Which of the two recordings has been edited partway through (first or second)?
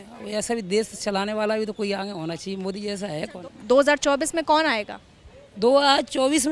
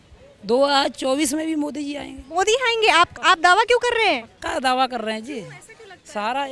first